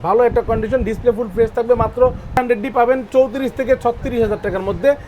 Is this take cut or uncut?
cut